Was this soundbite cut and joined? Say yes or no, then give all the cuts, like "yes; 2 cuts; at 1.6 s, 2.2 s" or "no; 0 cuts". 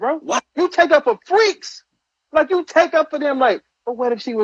no; 0 cuts